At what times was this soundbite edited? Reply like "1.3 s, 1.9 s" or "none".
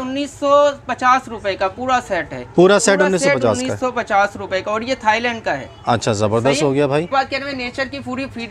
none